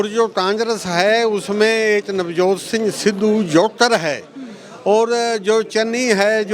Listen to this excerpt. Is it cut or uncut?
uncut